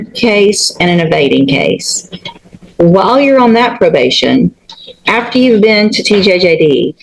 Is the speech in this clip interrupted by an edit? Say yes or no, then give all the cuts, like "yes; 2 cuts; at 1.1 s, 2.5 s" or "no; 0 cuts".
no; 0 cuts